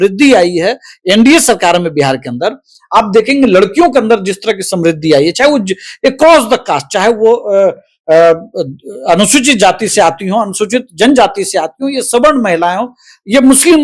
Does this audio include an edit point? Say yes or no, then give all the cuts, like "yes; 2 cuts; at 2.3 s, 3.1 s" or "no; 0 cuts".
no; 0 cuts